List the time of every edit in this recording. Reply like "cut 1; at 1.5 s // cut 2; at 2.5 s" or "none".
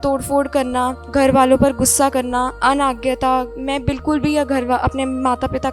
cut 1; at 1.0 s // cut 2; at 2.5 s // cut 3; at 3.6 s